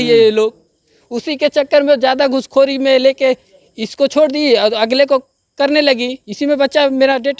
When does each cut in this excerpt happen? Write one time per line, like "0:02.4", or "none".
none

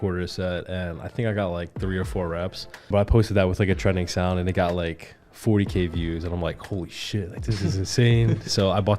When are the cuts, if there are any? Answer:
0:02.9

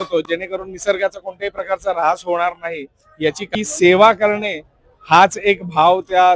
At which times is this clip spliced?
0:03.5

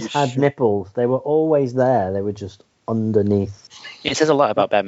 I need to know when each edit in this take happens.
0:03.6

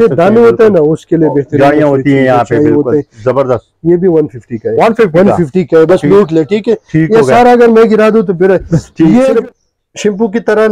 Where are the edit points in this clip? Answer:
0:09.3

